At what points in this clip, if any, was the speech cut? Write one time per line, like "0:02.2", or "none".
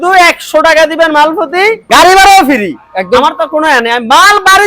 0:01.8